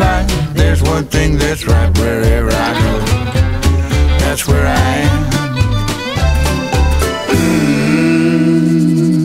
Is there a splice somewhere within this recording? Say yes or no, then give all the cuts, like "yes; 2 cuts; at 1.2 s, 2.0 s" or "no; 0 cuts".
no; 0 cuts